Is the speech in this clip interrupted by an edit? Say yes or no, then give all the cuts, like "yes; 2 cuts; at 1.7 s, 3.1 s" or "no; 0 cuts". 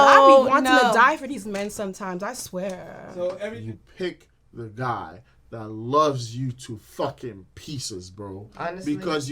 yes; 1 cut; at 3.5 s